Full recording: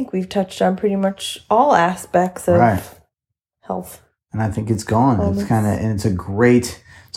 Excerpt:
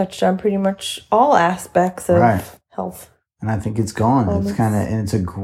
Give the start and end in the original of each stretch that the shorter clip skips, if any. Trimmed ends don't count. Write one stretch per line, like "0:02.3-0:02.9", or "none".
0:03.0-0:03.5